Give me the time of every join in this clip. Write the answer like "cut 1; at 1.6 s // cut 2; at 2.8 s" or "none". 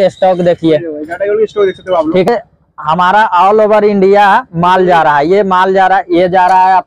cut 1; at 2.3 s